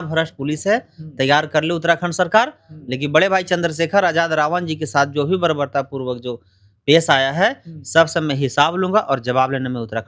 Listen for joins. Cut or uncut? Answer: uncut